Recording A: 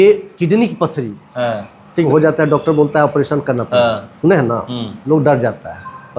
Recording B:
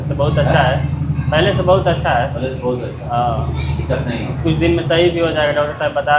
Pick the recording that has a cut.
A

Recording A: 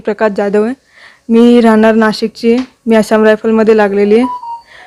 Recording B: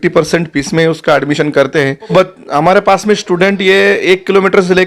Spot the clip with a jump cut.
B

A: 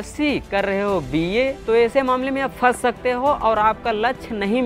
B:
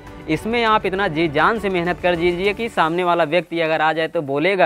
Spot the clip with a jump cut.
A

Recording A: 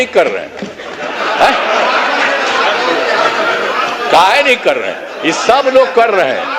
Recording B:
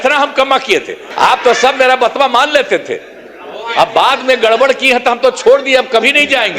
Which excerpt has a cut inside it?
B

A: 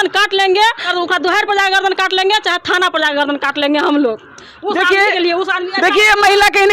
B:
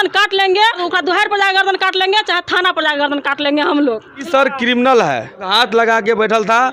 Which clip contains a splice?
B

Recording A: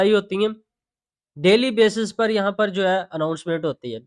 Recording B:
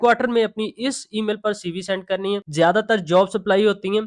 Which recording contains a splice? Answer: B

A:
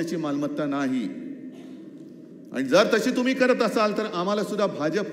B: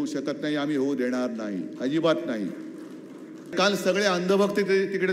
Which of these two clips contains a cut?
B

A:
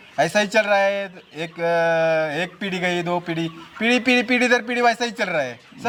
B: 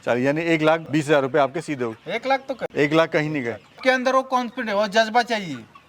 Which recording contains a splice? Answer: B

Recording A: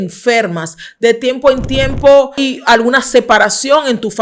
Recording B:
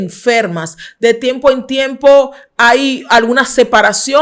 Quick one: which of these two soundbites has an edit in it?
A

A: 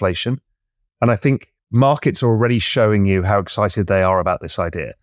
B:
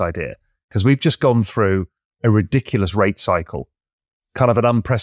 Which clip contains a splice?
A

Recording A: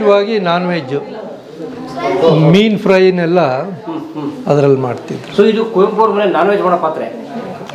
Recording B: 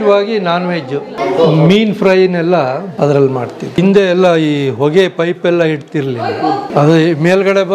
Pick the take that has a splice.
B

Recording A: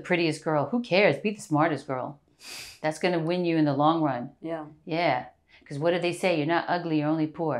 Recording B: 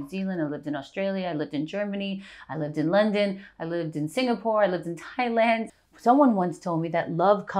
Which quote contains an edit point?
B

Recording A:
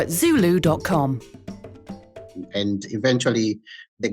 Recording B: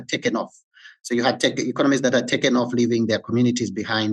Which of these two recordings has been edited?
A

